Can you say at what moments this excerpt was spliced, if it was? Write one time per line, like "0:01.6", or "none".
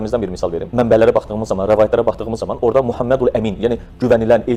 none